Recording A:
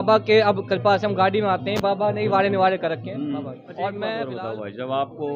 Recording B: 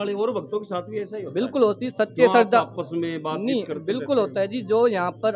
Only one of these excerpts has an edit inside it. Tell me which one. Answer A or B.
A